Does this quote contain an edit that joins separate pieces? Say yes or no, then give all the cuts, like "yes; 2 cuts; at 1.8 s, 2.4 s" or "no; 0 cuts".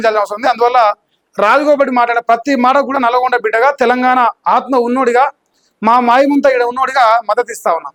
no; 0 cuts